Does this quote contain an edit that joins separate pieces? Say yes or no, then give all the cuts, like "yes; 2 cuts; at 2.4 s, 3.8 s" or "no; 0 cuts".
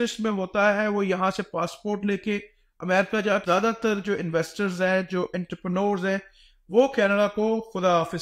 yes; 1 cut; at 3.4 s